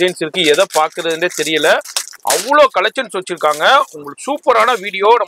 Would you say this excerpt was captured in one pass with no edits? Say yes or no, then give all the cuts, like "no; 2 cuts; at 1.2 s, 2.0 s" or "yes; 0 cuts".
yes; 0 cuts